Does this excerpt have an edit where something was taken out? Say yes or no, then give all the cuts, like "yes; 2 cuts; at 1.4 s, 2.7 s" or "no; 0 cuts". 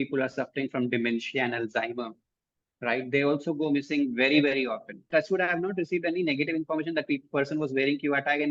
yes; 1 cut; at 5.0 s